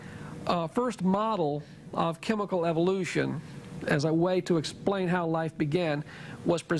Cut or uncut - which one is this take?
cut